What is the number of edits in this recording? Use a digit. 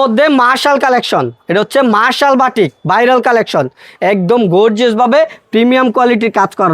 0